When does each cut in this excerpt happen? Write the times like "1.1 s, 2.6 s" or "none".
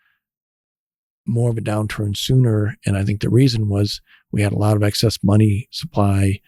none

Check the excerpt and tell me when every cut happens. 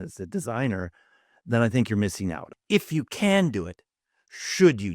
2.5 s

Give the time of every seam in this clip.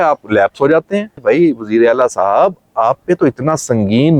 1.1 s

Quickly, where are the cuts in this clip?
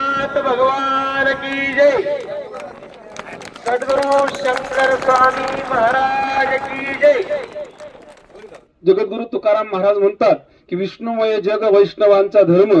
8.6 s

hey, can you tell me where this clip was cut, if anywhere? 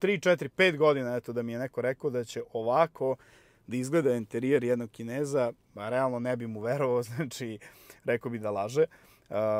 none

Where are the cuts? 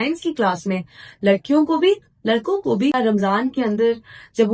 2.9 s

